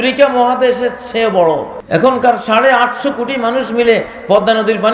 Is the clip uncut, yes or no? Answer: no